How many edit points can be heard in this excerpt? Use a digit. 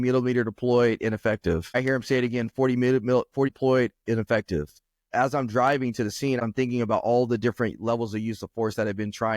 3